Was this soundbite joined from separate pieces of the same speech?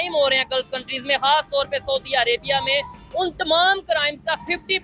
no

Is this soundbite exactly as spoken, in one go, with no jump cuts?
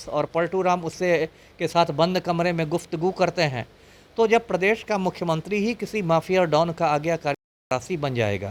yes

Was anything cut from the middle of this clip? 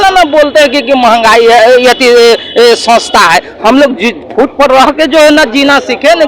no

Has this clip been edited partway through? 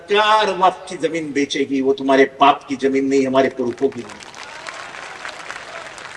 no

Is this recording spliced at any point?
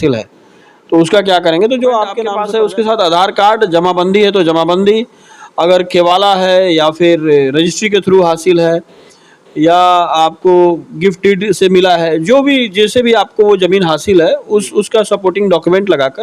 yes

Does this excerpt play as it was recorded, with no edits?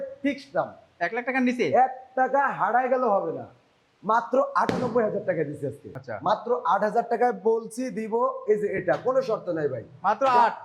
no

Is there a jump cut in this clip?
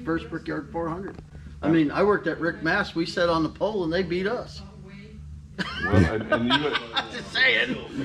no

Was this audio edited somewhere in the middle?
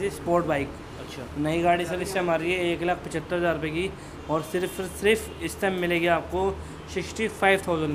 no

